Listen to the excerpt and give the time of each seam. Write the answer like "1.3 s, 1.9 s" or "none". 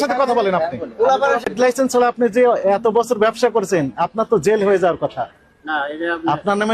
1.5 s